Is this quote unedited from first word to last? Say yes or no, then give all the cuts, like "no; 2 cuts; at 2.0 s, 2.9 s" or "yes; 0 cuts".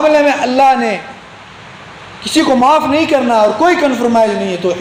yes; 0 cuts